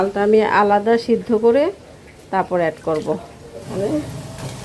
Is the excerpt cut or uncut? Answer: cut